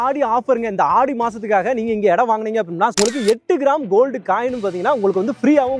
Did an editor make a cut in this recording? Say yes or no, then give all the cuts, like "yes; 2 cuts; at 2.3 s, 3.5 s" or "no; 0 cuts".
yes; 1 cut; at 2.9 s